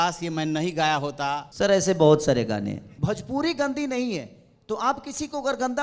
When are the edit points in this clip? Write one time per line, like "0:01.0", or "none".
0:01.5
0:02.9